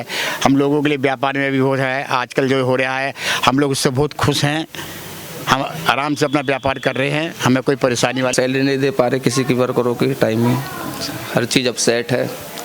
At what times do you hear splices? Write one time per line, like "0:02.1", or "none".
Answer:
0:08.3